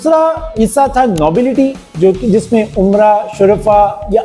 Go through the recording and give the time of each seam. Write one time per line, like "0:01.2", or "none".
none